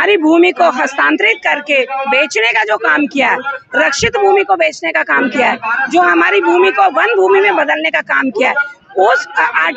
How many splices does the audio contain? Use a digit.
0